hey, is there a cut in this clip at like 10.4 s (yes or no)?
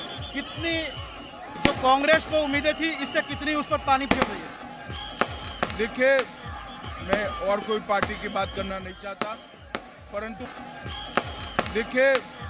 yes